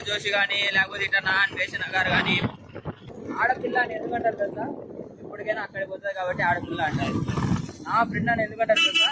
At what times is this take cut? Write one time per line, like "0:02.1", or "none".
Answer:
0:03.0